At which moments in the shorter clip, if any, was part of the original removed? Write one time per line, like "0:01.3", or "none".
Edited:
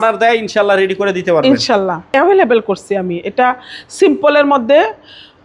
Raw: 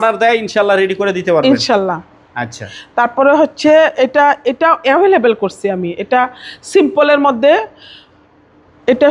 0:02.1